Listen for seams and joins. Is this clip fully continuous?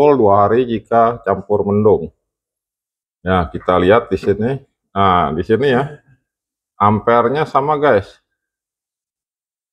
yes; 0 cuts

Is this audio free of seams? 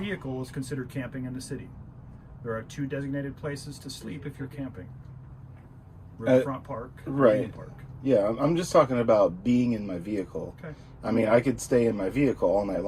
yes; 0 cuts

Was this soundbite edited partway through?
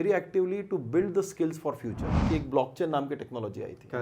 yes; 1 cut; at 2.2 s

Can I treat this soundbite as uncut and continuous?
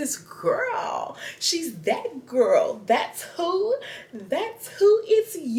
yes; 0 cuts

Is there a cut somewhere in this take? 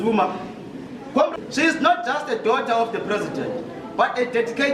yes; 1 cut; at 1.3 s

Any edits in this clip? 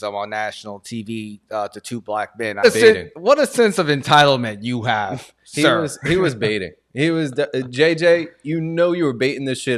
yes; 1 cut; at 2.6 s

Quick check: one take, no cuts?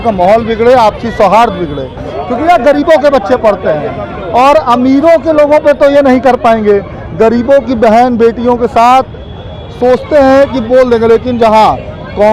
yes; 0 cuts

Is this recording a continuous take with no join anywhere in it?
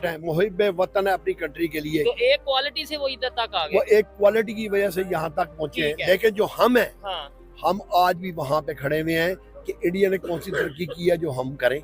yes; 0 cuts

